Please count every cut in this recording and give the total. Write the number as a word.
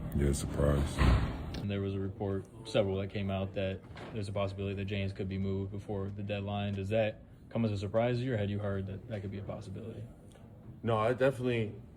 one